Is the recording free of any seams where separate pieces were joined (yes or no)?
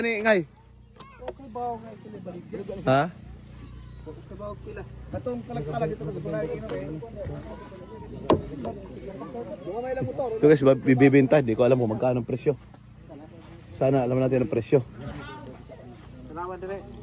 yes